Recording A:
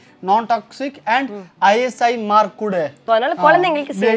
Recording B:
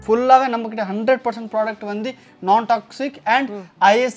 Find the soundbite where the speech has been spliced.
A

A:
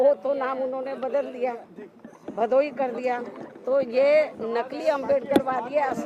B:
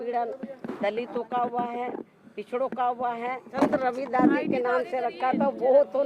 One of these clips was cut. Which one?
B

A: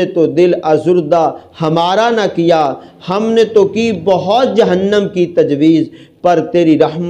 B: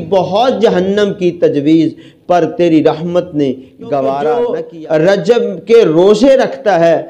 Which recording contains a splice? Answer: B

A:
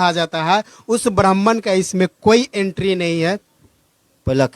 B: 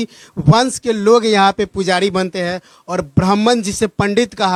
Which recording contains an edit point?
A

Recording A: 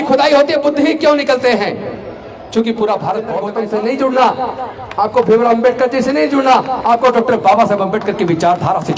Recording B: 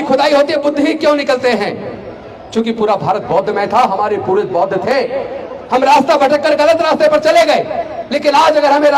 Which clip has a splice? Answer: A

